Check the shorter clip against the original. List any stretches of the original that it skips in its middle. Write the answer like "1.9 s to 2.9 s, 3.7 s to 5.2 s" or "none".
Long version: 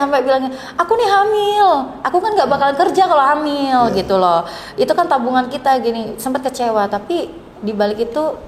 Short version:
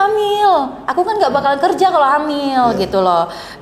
none